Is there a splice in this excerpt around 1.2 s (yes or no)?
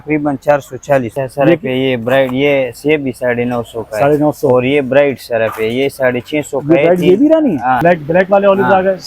yes